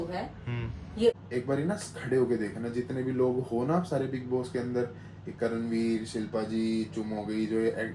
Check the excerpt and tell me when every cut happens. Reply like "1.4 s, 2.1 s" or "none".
1.1 s